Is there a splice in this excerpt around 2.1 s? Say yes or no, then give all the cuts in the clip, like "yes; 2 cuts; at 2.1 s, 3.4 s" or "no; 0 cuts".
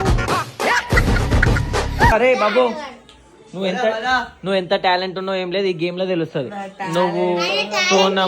yes; 1 cut; at 2.1 s